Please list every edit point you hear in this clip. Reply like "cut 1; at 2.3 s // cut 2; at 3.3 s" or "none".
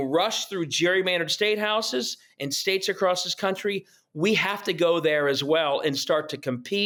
none